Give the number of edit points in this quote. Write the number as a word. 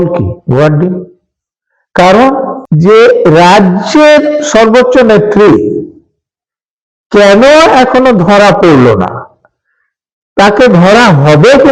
one